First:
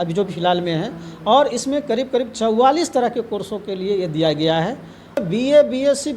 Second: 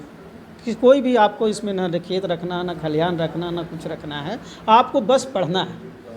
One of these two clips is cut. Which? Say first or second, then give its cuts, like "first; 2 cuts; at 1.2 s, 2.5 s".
first; 1 cut; at 5.2 s